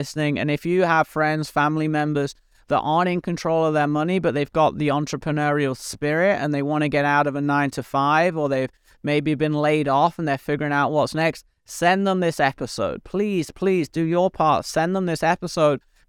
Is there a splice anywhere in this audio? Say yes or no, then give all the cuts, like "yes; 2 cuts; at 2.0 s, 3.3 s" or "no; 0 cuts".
no; 0 cuts